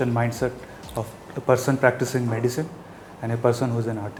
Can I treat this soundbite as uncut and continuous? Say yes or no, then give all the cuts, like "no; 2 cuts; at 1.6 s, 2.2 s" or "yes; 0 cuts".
yes; 0 cuts